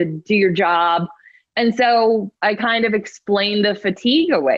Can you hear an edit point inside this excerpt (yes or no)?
no